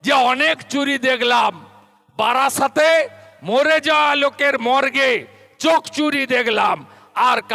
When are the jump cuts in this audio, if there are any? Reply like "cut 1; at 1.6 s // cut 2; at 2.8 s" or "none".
none